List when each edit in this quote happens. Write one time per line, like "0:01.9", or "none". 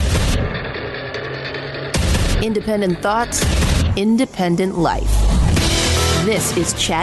none